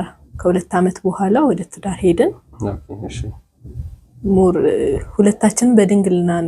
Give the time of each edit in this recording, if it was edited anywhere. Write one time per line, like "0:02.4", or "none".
none